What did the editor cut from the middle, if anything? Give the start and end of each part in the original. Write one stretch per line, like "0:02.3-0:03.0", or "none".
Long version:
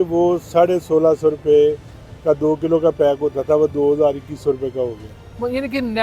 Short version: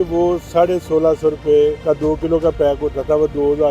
0:01.8-0:02.2